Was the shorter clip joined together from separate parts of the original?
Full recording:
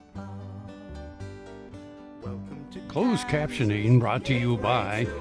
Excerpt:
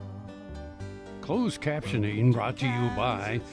yes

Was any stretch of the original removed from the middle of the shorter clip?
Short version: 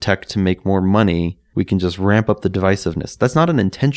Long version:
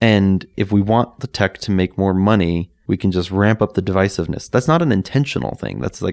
no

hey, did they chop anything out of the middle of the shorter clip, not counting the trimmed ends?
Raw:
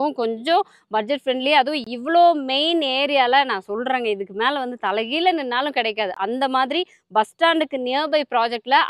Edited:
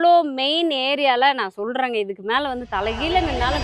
no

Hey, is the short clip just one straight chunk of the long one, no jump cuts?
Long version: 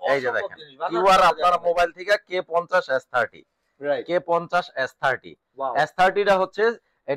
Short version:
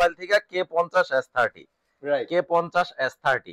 yes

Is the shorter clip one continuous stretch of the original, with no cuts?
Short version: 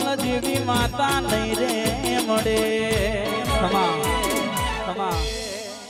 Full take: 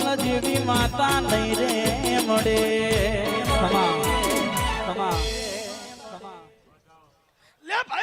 yes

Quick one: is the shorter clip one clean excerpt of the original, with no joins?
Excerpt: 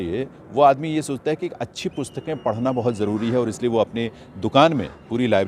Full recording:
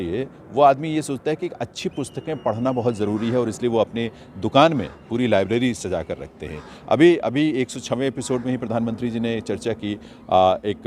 yes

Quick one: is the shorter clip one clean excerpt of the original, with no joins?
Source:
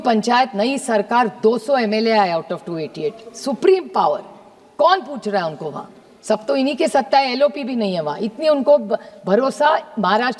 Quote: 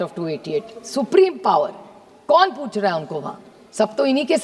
yes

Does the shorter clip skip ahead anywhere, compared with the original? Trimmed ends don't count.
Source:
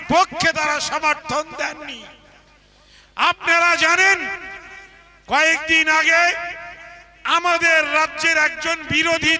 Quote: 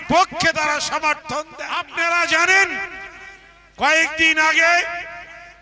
yes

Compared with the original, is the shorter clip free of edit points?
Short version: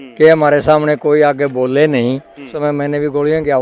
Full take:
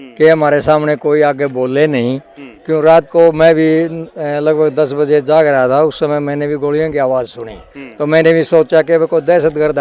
no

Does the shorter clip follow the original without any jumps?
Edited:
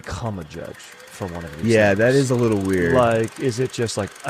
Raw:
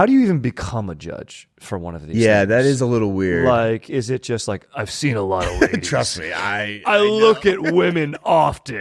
yes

